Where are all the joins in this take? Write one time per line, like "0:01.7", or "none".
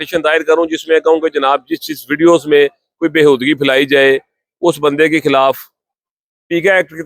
none